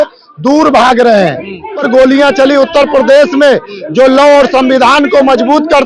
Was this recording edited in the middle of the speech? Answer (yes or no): yes